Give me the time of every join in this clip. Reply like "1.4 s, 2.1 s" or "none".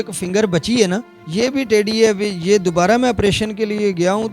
1.2 s